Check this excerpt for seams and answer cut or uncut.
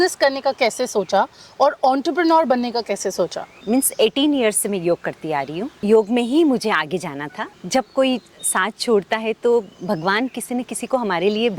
cut